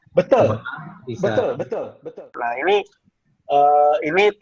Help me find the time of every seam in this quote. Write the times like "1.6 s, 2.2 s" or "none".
2.2 s